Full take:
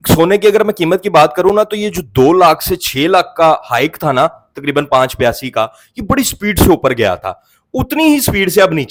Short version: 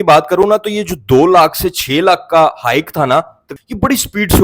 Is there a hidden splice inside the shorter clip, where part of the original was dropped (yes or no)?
yes